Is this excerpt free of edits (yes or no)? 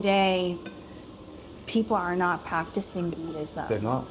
yes